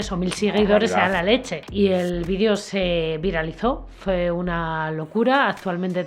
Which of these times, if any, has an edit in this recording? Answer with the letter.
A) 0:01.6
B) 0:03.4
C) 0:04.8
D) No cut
A